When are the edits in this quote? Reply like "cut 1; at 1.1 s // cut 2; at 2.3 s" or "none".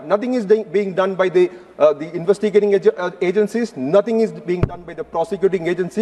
none

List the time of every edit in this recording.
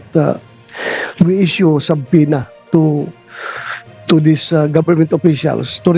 none

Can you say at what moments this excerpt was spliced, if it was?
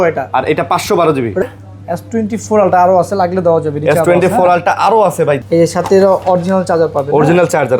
cut 1; at 1.4 s // cut 2; at 5.4 s

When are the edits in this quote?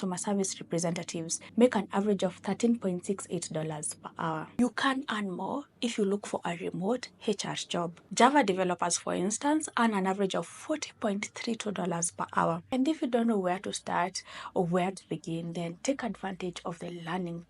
cut 1; at 4.5 s // cut 2; at 8.0 s // cut 3; at 12.6 s

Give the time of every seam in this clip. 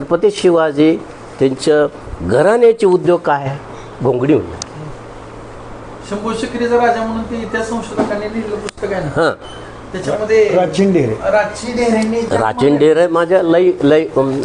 none

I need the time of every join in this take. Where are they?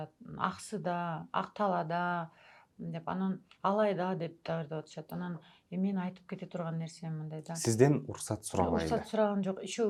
none

